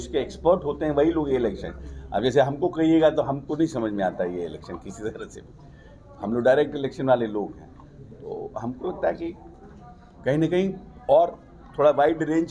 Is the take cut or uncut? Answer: uncut